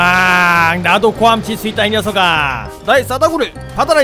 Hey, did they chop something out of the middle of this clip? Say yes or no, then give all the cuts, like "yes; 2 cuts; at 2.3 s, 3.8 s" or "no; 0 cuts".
no; 0 cuts